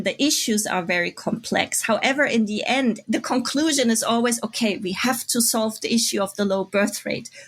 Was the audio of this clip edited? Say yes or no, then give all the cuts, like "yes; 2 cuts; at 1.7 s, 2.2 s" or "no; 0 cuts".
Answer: no; 0 cuts